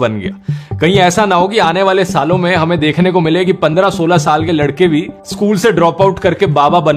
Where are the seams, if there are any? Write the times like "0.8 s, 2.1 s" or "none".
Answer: none